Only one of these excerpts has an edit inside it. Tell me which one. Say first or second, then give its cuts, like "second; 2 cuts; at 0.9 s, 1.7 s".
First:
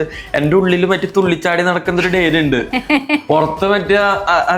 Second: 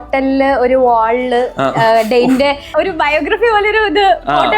second; 1 cut; at 2.7 s